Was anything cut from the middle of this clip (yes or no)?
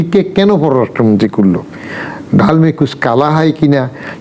no